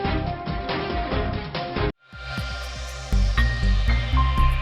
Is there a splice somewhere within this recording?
no; 0 cuts

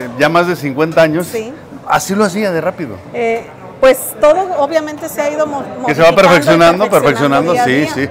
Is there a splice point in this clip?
no; 0 cuts

